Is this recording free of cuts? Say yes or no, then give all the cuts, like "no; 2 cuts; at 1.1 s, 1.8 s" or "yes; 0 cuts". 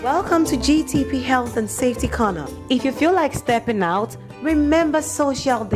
yes; 0 cuts